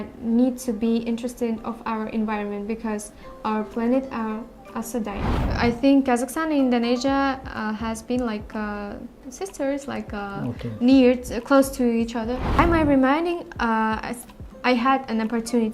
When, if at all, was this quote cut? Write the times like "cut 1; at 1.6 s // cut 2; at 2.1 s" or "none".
cut 1; at 5.4 s // cut 2; at 12.6 s